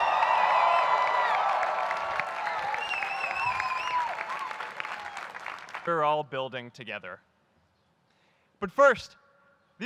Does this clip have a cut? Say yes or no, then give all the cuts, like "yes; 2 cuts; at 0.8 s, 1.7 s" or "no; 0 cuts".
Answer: no; 0 cuts